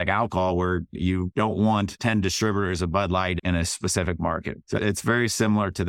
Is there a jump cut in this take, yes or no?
yes